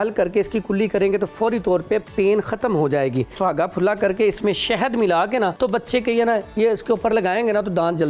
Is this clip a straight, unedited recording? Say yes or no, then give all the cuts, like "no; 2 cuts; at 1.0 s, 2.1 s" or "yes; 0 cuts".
no; 2 cuts; at 3.4 s, 5.5 s